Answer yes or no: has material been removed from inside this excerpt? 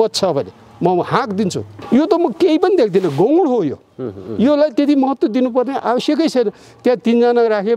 yes